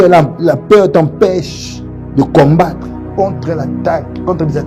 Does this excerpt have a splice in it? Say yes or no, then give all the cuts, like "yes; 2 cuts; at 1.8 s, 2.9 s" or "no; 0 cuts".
no; 0 cuts